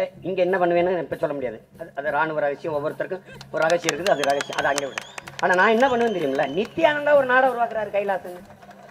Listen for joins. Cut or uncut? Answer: uncut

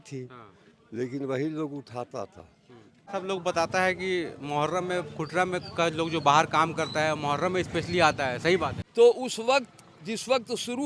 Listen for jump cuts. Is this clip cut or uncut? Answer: cut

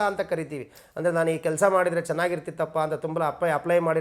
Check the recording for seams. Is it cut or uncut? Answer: uncut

